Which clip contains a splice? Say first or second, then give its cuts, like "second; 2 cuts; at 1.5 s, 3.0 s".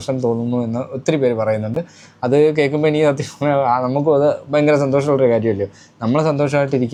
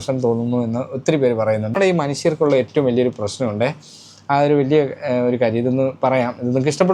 second; 1 cut; at 1.7 s